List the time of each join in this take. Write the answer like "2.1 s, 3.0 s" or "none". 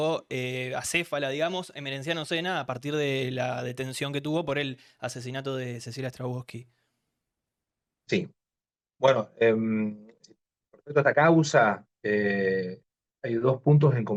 none